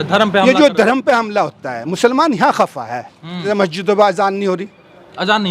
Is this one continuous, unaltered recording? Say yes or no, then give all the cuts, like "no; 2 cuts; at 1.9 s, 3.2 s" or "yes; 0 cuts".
no; 1 cut; at 3.5 s